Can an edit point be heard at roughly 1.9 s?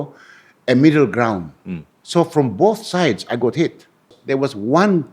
yes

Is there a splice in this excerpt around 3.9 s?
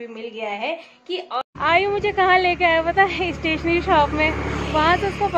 no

